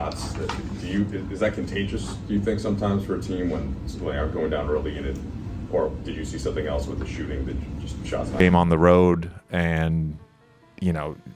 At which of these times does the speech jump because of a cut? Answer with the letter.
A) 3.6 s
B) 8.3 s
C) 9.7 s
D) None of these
B